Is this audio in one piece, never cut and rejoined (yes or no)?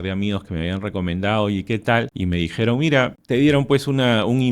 no